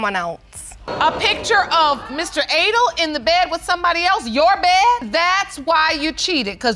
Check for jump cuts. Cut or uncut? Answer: cut